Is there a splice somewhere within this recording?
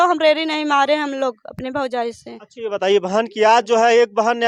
no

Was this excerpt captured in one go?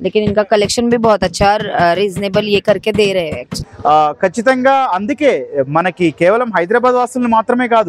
no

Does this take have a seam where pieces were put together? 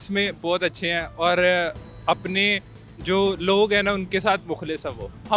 no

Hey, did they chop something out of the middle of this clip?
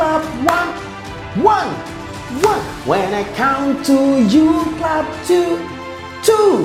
no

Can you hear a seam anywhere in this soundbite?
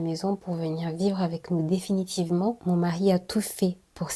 yes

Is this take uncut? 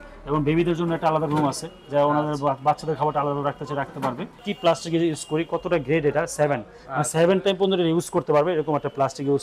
no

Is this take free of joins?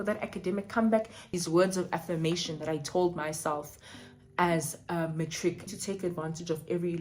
no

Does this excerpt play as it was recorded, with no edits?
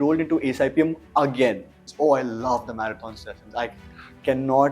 no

